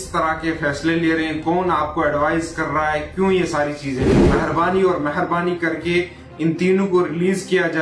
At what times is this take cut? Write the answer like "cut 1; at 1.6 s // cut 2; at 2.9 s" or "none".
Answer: cut 1; at 4.1 s